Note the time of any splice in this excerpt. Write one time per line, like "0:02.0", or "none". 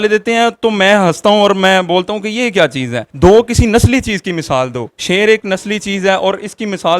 0:03.0